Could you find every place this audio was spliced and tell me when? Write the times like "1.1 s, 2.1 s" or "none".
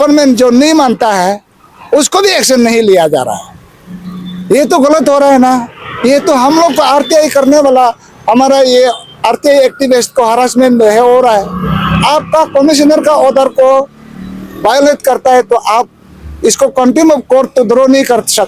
none